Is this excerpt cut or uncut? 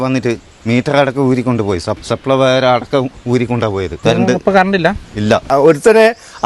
cut